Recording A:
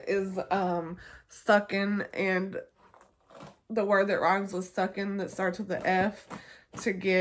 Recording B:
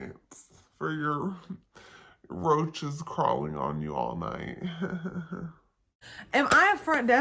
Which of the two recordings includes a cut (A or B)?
B